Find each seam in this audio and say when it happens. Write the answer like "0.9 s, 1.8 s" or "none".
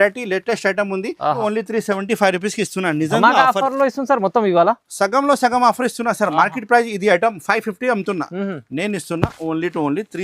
1.4 s